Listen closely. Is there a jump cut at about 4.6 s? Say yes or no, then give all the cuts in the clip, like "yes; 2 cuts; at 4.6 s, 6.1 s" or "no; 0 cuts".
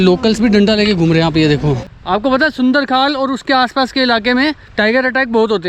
yes; 2 cuts; at 1.9 s, 4.6 s